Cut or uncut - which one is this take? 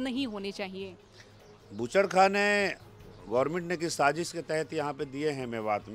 uncut